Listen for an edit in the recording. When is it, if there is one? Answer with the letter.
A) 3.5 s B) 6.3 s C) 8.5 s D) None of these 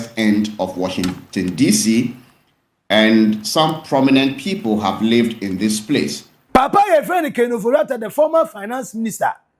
B